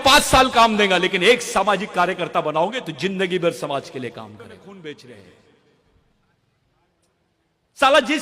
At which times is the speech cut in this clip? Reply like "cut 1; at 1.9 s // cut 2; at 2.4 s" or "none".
cut 1; at 4.6 s